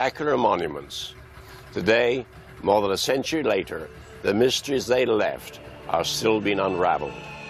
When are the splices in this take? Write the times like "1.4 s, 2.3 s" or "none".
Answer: 1.6 s